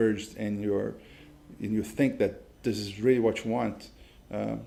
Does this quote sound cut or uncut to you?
uncut